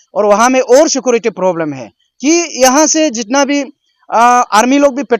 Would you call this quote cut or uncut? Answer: uncut